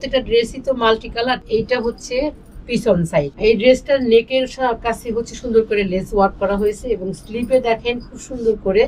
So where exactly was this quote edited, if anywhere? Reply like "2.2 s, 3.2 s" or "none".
1.4 s, 3.3 s